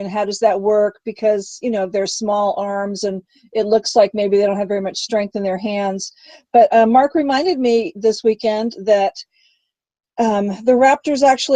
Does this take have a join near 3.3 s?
no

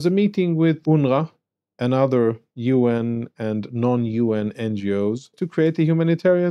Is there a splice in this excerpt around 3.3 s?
no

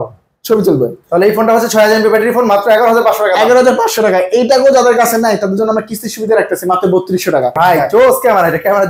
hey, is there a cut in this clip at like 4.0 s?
no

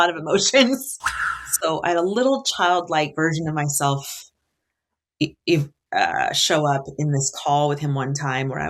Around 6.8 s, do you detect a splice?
no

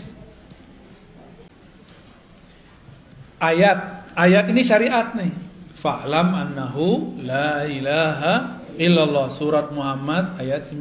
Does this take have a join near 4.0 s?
no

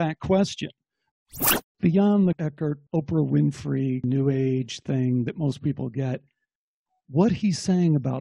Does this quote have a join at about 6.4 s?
no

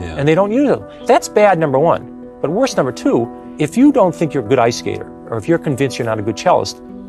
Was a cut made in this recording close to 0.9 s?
yes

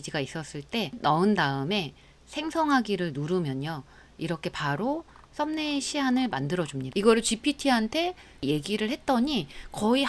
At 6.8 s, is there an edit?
yes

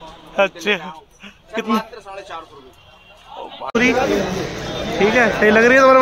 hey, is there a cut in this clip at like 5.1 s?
no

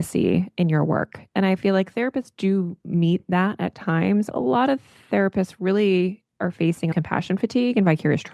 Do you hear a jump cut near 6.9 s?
yes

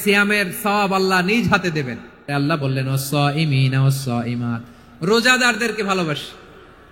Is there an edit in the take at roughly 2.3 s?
yes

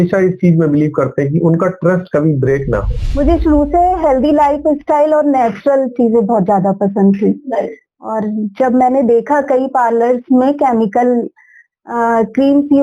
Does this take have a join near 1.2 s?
no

